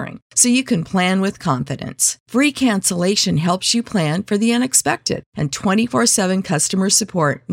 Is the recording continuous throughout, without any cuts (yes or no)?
yes